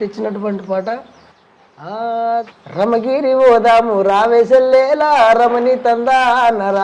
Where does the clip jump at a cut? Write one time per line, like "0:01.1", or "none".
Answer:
none